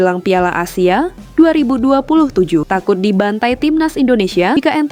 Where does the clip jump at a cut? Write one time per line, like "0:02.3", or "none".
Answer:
none